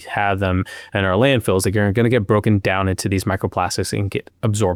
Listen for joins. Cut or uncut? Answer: uncut